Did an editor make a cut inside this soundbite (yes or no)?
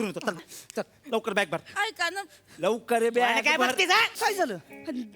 yes